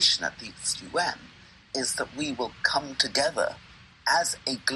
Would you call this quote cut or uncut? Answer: uncut